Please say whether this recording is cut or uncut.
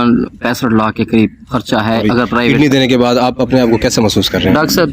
cut